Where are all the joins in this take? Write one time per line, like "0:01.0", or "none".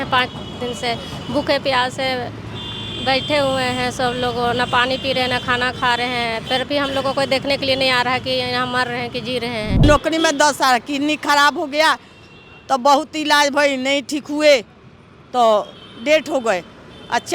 0:09.8